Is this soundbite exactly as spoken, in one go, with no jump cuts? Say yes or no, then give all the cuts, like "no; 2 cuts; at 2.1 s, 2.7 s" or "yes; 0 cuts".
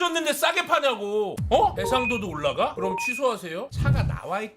no; 1 cut; at 1.3 s